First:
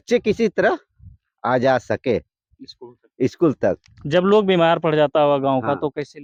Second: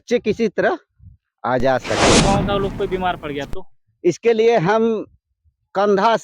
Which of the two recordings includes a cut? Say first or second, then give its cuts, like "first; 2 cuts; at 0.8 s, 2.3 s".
second; 1 cut; at 2.2 s